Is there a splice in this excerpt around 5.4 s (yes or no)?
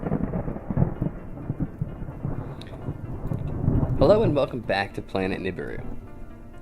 no